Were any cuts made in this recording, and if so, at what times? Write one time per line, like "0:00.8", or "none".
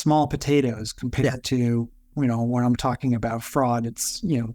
0:02.0